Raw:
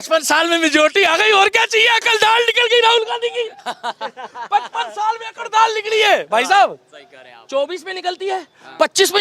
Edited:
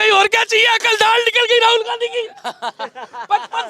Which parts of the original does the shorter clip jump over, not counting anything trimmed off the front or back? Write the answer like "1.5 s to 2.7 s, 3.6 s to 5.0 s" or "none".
none